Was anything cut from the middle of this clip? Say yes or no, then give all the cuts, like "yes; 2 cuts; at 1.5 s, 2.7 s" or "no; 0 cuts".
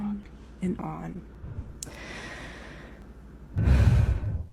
yes; 1 cut; at 1.2 s